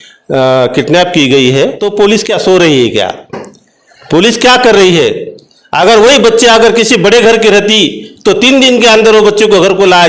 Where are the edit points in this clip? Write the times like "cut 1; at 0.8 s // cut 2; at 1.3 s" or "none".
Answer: cut 1; at 1.8 s